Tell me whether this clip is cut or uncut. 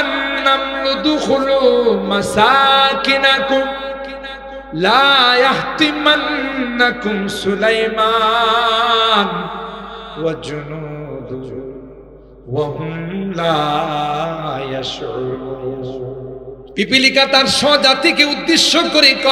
cut